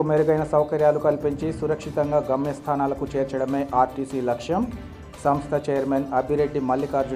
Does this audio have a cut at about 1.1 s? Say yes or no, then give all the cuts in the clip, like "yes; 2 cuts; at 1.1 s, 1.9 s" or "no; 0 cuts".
no; 0 cuts